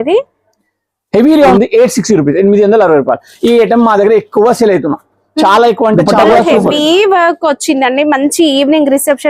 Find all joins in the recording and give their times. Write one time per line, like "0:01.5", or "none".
0:01.5
0:06.1